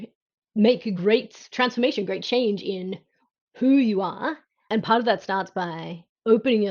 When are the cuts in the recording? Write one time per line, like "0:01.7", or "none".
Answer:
0:01.0
0:04.7